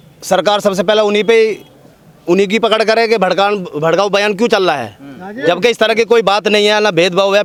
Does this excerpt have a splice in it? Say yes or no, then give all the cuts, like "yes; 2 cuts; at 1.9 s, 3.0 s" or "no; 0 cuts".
no; 0 cuts